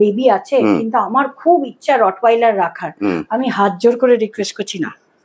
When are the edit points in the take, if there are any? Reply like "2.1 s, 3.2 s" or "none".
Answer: none